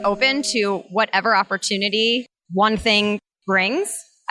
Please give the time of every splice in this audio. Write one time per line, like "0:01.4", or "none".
0:02.4